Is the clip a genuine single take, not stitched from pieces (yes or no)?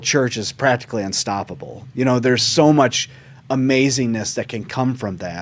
yes